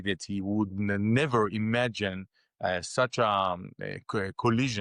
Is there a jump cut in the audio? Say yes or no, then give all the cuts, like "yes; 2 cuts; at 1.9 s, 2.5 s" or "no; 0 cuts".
no; 0 cuts